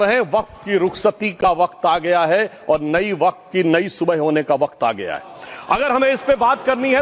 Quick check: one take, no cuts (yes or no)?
yes